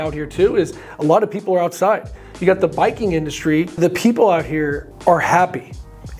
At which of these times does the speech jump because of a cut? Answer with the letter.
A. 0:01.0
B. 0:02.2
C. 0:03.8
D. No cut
C